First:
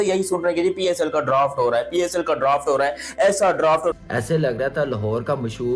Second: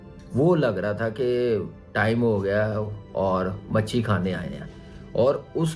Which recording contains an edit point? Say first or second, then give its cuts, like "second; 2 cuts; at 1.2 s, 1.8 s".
first; 1 cut; at 4.0 s